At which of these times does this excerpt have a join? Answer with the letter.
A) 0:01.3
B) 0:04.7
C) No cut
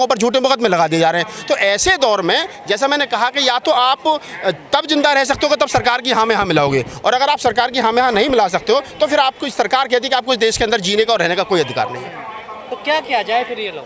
C